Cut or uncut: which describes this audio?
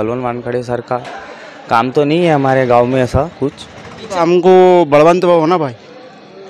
cut